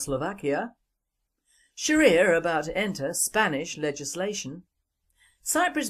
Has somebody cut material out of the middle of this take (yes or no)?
no